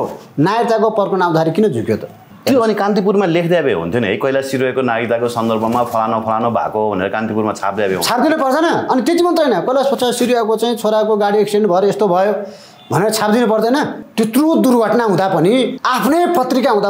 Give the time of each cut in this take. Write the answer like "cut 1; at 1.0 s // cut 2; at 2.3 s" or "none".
cut 1; at 2.3 s // cut 2; at 14.0 s // cut 3; at 15.8 s